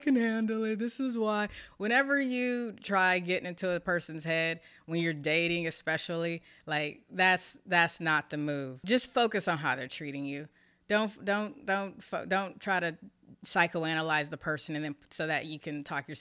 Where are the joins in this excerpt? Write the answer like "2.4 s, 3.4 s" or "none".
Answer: 8.8 s